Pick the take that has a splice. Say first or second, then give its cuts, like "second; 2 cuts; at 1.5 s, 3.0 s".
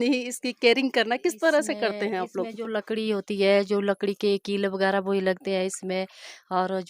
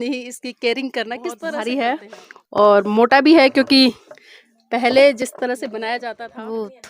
second; 2 cuts; at 1.6 s, 6.1 s